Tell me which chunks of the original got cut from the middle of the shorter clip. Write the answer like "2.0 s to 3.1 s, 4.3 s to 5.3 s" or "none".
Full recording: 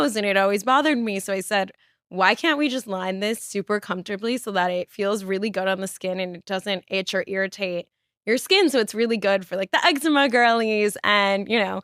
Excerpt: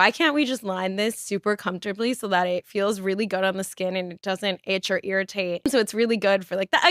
7.9 s to 8.7 s

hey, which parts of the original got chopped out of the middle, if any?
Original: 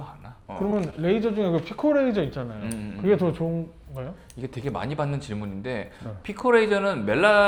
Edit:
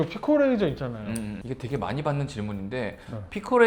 2.9 s to 4.2 s

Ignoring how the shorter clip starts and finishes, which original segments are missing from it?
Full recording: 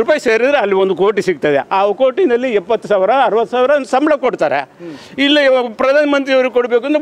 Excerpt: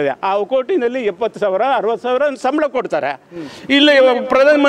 none

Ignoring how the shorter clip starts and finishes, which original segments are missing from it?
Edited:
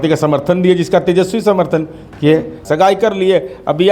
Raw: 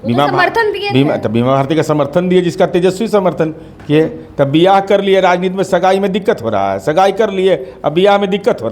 4.3 s to 6.8 s

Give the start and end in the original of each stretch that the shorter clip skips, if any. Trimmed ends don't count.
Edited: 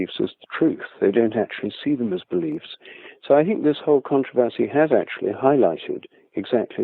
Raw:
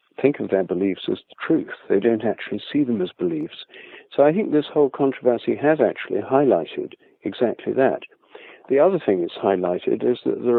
none

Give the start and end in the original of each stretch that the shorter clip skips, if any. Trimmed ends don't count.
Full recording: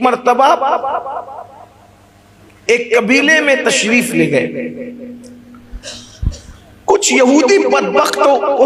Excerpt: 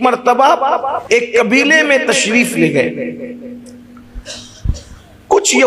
1.0 s to 2.6 s

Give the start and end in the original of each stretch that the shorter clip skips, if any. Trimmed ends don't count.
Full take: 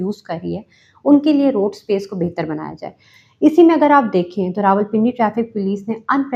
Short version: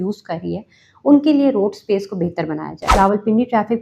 2.8 s to 4.5 s

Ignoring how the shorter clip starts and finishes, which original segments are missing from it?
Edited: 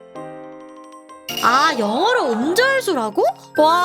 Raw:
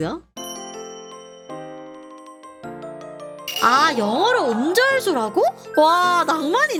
2.8 s to 3.6 s

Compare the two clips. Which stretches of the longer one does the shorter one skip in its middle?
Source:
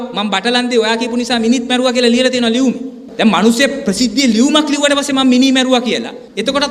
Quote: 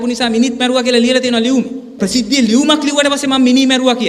3.0 s to 3.8 s

